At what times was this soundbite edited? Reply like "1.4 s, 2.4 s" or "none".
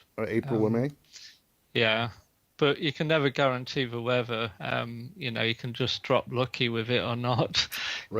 3.8 s